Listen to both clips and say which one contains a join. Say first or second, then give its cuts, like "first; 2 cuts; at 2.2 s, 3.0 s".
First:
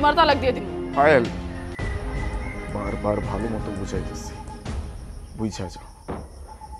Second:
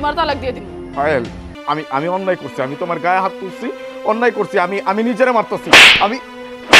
second; 1 cut; at 1.5 s